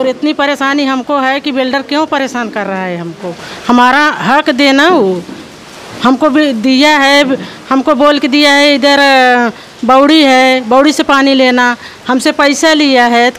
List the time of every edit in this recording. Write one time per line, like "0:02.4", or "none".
none